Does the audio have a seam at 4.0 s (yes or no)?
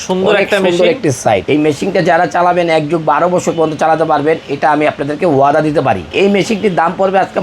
no